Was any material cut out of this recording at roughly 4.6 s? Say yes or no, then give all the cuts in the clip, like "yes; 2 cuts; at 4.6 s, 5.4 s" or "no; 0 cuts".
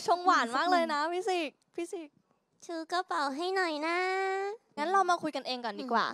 yes; 1 cut; at 4.6 s